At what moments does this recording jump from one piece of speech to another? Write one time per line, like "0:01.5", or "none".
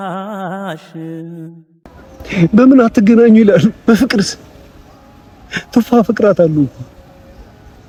none